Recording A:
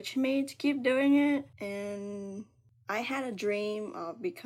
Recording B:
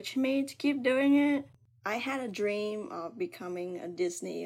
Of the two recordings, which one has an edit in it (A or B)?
B